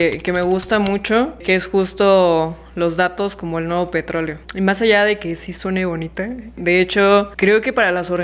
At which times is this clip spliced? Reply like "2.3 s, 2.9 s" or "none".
1.4 s, 4.4 s, 6.6 s, 7.3 s